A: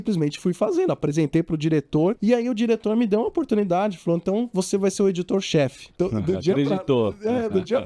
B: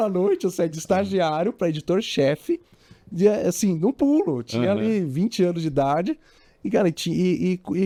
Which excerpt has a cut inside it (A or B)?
A